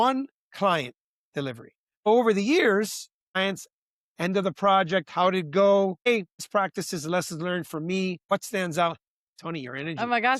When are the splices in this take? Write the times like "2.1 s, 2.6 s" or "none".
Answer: 2.1 s, 3.4 s, 6.1 s, 8.2 s